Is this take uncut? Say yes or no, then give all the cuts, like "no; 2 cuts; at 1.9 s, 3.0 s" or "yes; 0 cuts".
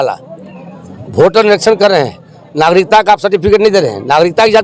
yes; 0 cuts